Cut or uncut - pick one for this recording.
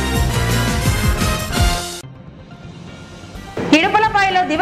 cut